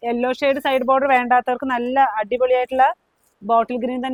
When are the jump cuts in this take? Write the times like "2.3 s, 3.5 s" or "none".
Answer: none

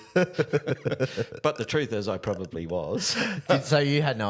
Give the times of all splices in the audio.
none

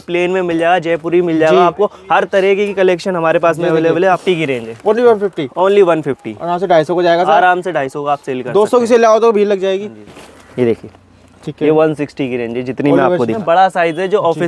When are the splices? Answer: 4.2 s, 10.0 s, 13.4 s

